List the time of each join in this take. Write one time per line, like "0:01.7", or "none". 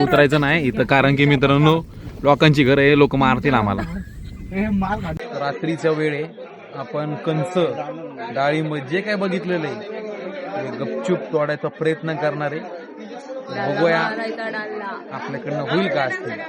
0:05.2